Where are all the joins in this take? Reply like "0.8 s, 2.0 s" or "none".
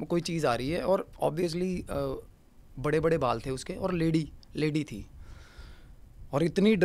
none